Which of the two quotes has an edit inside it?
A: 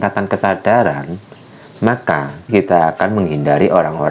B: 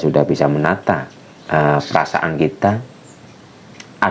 A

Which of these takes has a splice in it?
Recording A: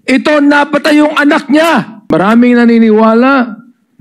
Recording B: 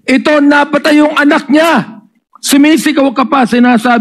A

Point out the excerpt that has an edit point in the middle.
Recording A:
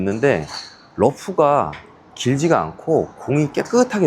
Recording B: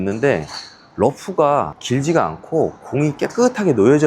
B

